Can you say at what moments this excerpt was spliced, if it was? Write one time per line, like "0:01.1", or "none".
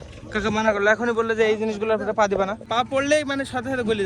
0:02.6

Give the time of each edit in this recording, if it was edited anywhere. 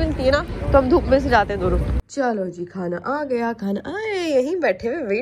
0:02.0

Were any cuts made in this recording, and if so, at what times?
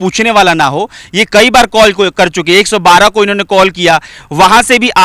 none

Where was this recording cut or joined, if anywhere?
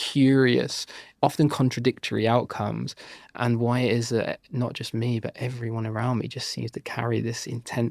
0:01.0
0:03.4

